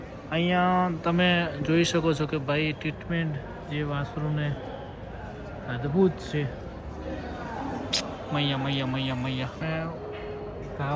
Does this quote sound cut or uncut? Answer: cut